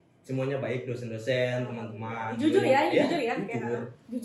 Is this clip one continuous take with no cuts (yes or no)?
yes